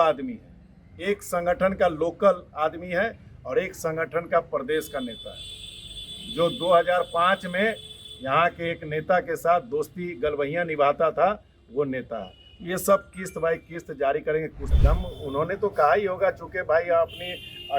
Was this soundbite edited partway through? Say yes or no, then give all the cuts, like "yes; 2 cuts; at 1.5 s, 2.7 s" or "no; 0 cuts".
yes; 1 cut; at 14.7 s